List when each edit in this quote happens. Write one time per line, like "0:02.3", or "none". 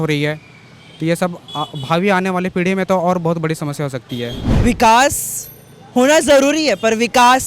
0:04.4